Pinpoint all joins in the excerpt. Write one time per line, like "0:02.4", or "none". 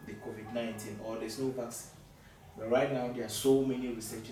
none